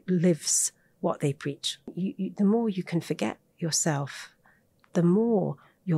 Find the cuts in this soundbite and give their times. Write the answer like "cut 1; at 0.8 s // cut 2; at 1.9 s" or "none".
cut 1; at 1.9 s